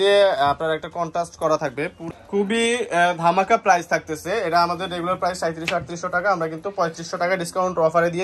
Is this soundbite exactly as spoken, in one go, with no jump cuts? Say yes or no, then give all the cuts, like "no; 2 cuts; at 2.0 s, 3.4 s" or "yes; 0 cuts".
no; 1 cut; at 2.0 s